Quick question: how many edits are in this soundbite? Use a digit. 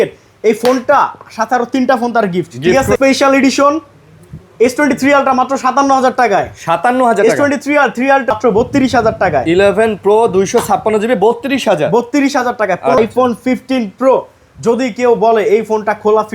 3